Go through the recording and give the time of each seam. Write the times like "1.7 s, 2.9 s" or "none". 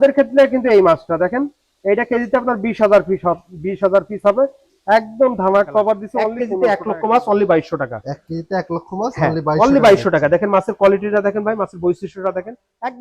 6.4 s